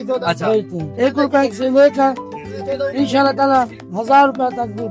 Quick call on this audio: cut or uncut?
uncut